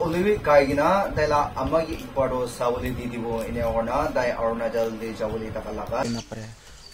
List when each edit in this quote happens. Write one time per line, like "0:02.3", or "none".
0:06.0